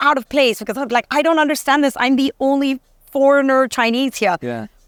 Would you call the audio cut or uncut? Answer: uncut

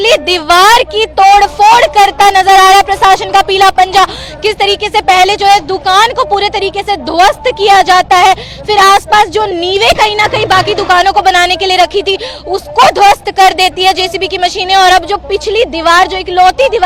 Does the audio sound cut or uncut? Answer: uncut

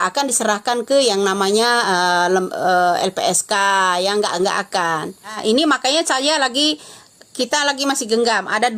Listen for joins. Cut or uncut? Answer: cut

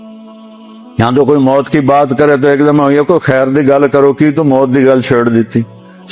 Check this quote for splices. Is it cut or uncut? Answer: cut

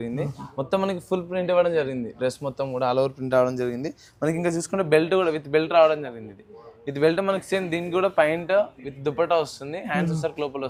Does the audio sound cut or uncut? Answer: uncut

